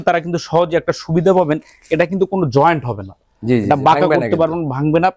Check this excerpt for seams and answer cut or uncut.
uncut